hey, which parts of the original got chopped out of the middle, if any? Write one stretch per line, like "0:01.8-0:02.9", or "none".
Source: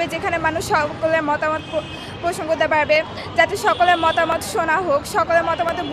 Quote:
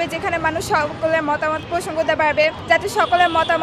0:01.6-0:02.1
0:03.1-0:03.3

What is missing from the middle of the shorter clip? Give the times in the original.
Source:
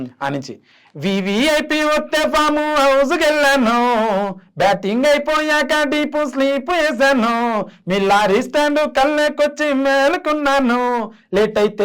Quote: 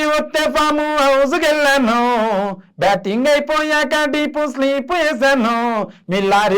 none

